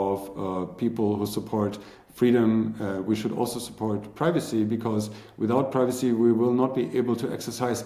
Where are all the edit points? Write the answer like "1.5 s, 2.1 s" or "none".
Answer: none